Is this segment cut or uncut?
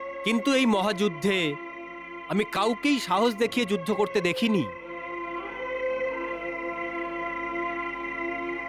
uncut